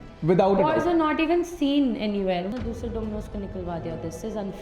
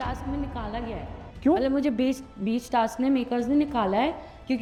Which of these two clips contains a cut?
first; 1 cut; at 2.5 s

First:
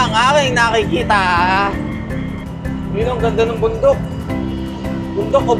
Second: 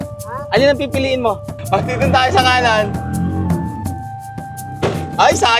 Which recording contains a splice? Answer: second; 1 cut; at 1.5 s

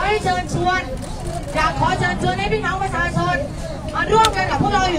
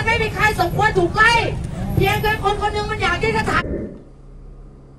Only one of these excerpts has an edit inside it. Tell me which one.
second; 1 cut; at 3.6 s

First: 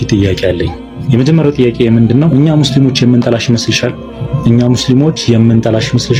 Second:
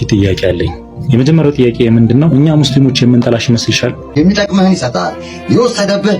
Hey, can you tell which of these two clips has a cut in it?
second; 1 cut; at 4.0 s

